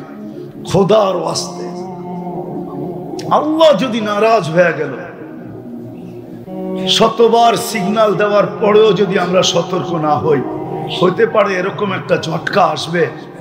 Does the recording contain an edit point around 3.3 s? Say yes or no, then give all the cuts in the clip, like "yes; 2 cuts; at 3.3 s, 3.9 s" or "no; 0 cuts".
yes; 2 cuts; at 1.4 s, 3.3 s